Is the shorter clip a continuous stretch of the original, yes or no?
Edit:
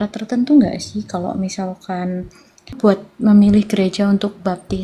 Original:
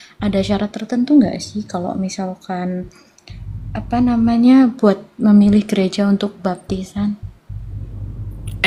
no